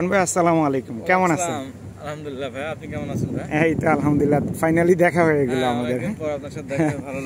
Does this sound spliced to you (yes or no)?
no